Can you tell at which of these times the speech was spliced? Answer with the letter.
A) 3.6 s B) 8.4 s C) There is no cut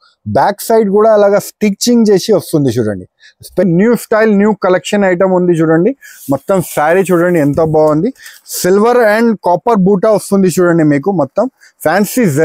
A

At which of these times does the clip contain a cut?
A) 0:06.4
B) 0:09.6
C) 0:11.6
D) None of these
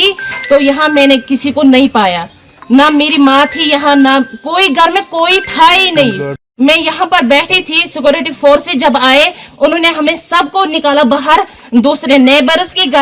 A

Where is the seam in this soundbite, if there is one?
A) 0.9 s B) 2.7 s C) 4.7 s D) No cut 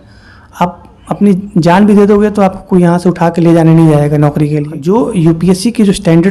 C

